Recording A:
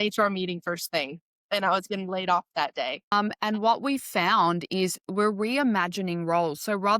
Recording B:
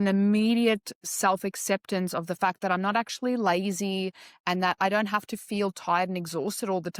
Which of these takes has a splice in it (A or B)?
A